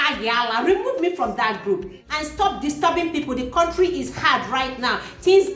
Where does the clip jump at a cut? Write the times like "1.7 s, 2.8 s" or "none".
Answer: 2.1 s